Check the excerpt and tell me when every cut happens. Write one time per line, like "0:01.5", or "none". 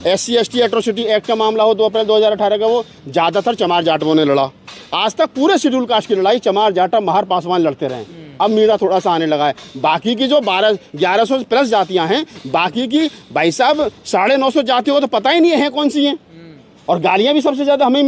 none